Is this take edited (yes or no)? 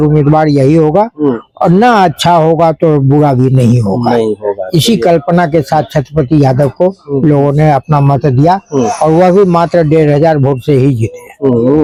no